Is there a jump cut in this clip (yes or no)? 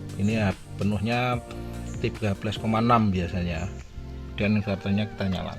no